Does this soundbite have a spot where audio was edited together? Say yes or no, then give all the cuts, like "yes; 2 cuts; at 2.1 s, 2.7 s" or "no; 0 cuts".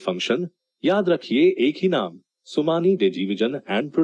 no; 0 cuts